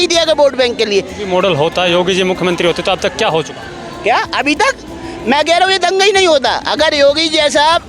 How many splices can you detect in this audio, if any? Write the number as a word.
one